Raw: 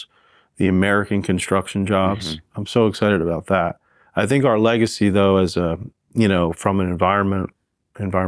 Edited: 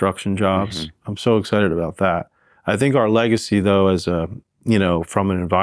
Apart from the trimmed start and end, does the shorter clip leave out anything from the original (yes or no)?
no